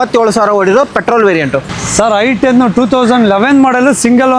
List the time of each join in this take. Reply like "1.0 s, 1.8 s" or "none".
none